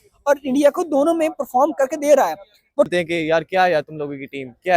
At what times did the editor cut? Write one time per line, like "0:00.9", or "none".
0:02.9